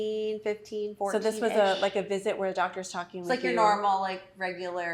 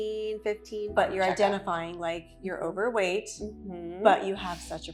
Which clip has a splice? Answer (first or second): second